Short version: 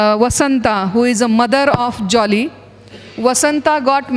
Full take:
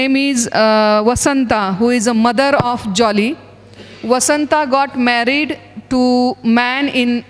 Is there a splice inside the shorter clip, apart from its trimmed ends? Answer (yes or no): no